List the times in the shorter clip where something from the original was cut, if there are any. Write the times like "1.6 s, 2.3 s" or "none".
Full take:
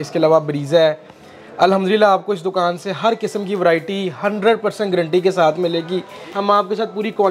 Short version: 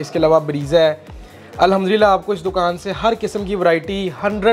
none